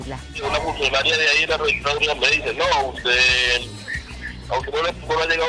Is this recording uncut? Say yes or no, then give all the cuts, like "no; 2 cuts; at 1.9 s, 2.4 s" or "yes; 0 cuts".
yes; 0 cuts